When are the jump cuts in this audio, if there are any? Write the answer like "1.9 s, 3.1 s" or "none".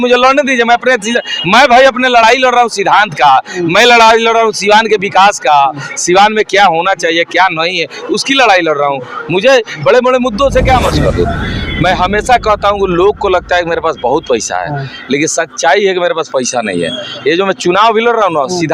10.9 s